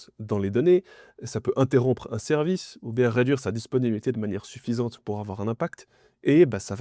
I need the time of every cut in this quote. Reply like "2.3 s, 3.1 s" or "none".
none